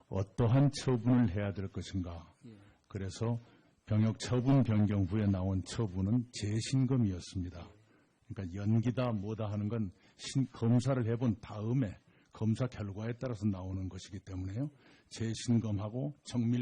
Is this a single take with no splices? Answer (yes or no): no